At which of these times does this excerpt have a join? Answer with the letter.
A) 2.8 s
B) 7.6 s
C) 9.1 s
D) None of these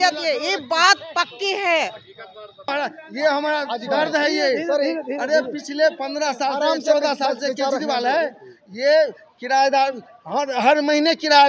A